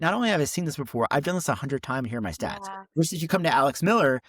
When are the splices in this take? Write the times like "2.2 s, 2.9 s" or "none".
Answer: none